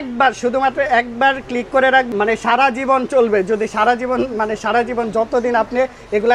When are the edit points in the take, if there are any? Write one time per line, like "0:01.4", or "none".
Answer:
none